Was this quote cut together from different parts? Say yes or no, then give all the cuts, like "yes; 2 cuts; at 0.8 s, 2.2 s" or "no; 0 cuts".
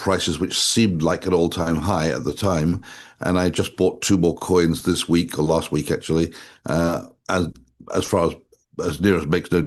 no; 0 cuts